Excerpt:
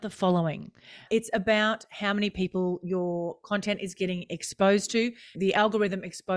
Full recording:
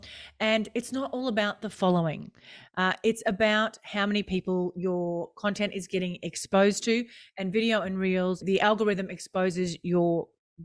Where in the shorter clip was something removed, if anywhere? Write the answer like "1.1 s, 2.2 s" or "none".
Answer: 1.0 s, 5.3 s